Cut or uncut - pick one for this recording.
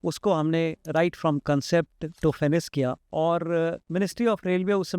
cut